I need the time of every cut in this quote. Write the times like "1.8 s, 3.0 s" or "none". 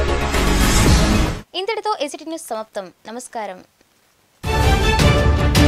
none